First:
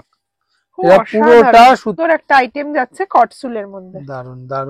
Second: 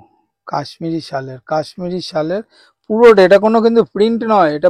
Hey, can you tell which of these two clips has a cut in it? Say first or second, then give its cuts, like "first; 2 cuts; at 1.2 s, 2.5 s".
first; 1 cut; at 1.9 s